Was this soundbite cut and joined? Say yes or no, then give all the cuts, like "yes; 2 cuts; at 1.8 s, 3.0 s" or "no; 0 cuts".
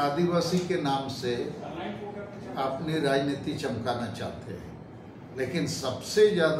no; 0 cuts